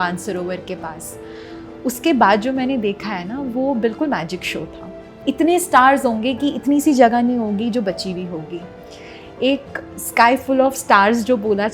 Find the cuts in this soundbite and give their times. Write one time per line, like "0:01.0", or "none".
0:05.0